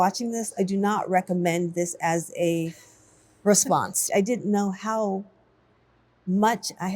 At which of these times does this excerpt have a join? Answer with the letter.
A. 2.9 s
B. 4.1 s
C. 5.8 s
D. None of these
B